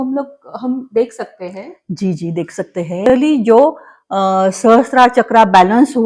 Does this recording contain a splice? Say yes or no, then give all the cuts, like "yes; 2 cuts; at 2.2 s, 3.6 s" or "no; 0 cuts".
yes; 1 cut; at 3.1 s